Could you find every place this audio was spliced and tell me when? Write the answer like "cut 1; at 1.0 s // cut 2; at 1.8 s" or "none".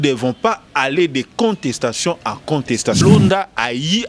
cut 1; at 3.0 s